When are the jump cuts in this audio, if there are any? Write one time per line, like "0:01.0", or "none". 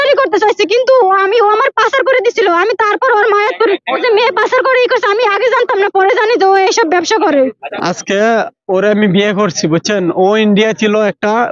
0:04.0
0:07.7